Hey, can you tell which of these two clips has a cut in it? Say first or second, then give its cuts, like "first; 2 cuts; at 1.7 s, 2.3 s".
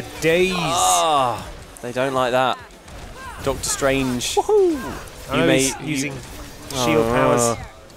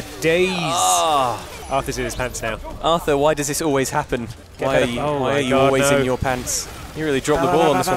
second; 4 cuts; at 1.6 s, 2.7 s, 4.4 s, 6.9 s